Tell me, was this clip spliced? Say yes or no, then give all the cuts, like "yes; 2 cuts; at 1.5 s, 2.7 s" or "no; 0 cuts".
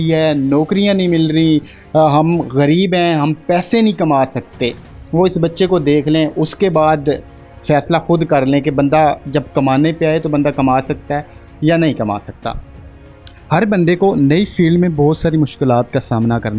no; 0 cuts